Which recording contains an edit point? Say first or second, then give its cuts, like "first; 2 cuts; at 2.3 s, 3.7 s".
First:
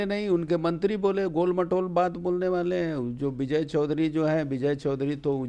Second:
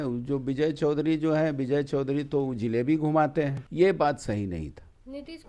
second; 1 cut; at 3.6 s